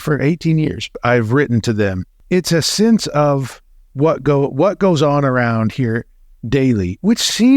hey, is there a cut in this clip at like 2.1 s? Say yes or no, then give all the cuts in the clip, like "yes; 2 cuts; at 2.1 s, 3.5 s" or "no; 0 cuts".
yes; 2 cuts; at 0.9 s, 2.1 s